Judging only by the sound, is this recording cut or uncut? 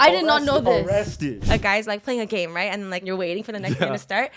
cut